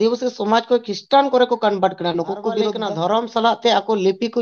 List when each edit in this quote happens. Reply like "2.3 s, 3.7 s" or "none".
2.8 s

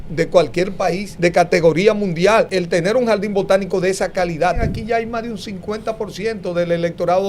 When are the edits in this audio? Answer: 1.1 s, 2.6 s, 4.6 s

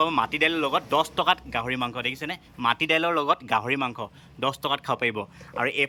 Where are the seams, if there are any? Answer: none

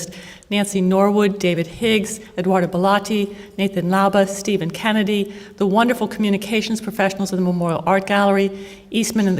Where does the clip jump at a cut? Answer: 3.9 s

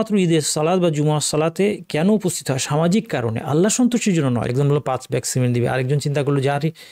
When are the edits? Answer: 4.5 s

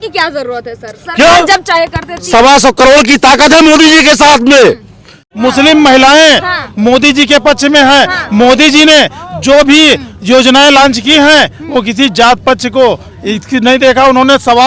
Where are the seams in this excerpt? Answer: 5.3 s

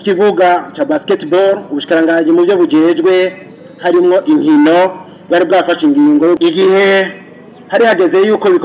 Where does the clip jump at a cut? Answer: 6.4 s

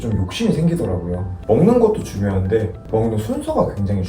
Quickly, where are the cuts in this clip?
1.4 s

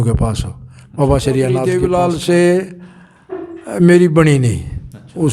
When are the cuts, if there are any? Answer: 1.6 s

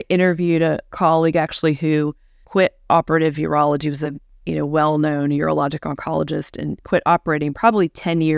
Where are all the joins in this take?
0.9 s, 6.8 s

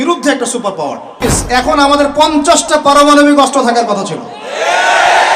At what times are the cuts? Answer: 1.3 s

